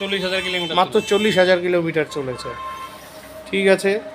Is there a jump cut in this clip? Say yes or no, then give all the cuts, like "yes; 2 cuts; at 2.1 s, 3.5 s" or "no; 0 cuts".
no; 0 cuts